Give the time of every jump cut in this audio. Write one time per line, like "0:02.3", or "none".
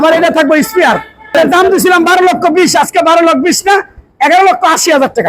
0:01.3